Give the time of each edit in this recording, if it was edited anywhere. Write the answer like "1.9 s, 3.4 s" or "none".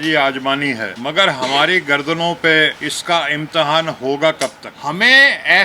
0.9 s, 2.9 s, 4.7 s